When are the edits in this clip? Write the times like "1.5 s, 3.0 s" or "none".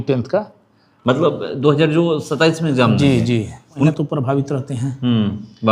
3.9 s